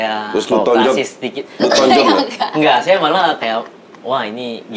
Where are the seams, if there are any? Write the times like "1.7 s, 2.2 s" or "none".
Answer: 3.8 s